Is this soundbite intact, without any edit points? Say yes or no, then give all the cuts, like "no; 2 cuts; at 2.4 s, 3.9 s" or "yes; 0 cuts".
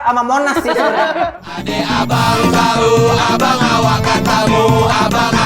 no; 1 cut; at 1.5 s